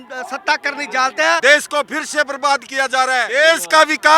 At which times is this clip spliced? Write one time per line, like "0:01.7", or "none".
0:01.4
0:03.3